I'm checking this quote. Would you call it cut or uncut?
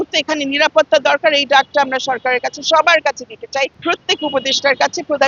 uncut